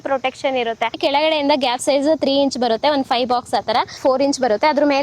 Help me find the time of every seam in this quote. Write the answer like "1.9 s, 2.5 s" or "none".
1.0 s, 4.0 s

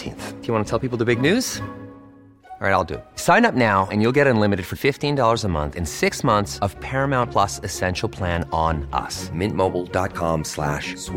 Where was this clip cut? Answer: none

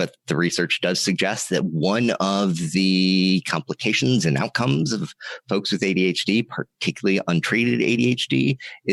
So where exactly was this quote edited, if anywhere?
none

